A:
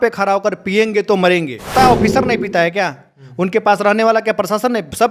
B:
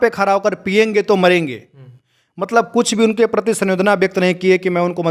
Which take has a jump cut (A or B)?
A